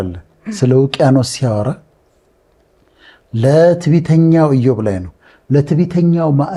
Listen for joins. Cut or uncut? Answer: uncut